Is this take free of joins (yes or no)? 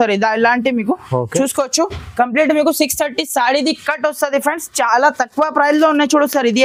yes